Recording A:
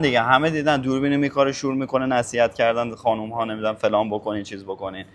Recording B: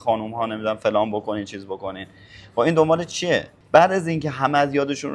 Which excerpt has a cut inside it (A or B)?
B